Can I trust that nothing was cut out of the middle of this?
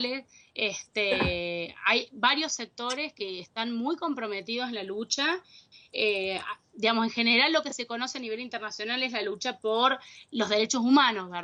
no; 1 cut; at 2.8 s

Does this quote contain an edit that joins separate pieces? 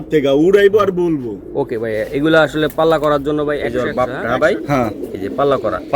yes; 1 cut; at 3.7 s

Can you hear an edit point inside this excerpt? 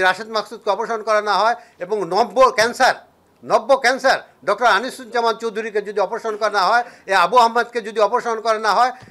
no; 0 cuts

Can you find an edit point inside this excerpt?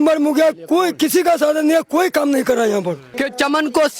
yes; 1 cut; at 3.1 s

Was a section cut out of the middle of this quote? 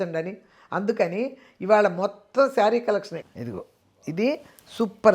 yes; 1 cut; at 3.2 s

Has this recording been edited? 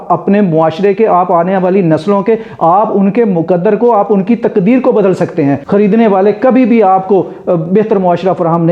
yes; 1 cut; at 5.6 s

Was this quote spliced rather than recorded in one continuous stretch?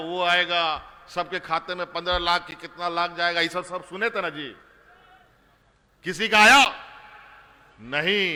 no; 0 cuts

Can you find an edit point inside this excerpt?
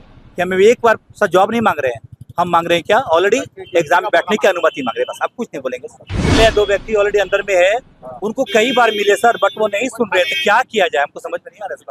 no; 0 cuts

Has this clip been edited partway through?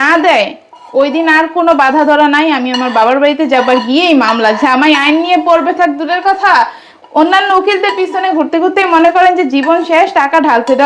no; 0 cuts

